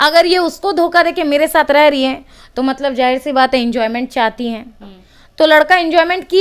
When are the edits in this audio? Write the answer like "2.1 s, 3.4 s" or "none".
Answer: none